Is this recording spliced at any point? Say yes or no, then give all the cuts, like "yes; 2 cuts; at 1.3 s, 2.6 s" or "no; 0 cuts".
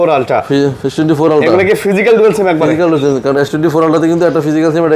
no; 0 cuts